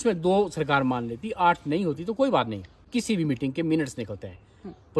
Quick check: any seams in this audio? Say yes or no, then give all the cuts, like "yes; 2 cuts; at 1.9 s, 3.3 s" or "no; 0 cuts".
yes; 1 cut; at 2.9 s